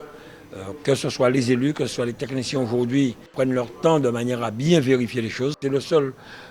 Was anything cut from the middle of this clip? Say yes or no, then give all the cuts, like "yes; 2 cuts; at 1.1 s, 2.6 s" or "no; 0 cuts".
yes; 2 cuts; at 3.3 s, 5.6 s